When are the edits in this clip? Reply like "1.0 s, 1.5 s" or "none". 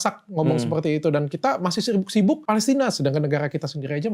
2.4 s